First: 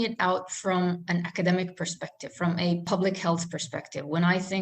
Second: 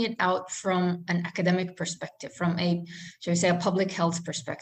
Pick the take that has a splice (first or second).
first